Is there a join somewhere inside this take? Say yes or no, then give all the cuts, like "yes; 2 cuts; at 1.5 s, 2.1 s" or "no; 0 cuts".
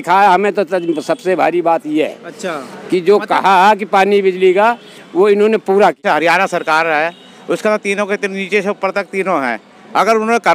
yes; 1 cut; at 6.0 s